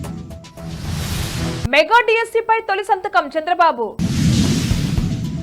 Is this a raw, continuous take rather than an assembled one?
no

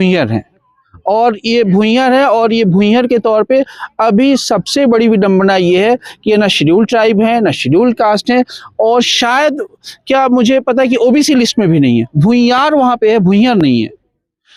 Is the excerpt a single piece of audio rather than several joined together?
yes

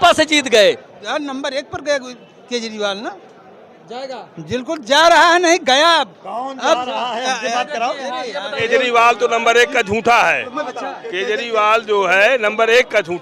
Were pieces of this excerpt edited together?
yes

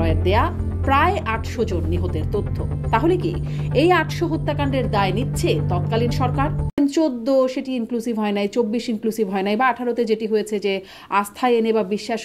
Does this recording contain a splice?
yes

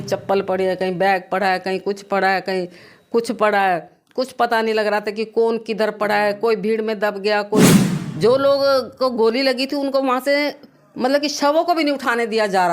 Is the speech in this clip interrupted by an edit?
yes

